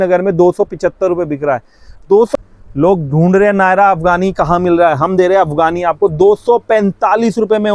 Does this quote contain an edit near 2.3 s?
yes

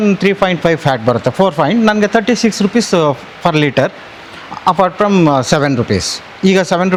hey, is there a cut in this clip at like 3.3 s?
no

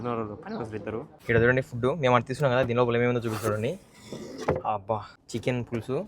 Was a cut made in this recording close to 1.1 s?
yes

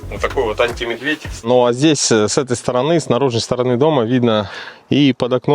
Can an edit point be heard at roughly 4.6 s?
yes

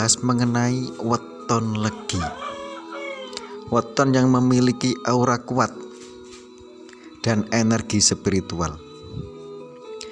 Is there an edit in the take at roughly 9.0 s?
no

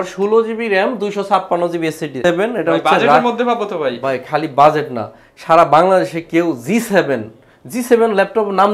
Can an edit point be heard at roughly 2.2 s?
yes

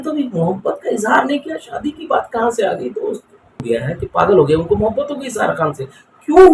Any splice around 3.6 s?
yes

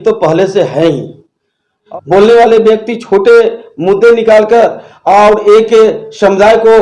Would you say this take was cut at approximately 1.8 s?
yes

